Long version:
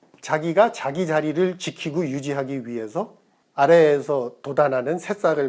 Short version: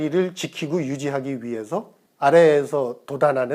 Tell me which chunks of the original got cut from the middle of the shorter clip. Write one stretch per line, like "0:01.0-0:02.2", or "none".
0:03.2-0:03.4